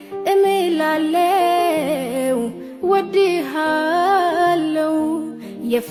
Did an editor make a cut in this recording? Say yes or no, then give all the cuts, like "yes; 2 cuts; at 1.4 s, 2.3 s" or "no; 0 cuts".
no; 0 cuts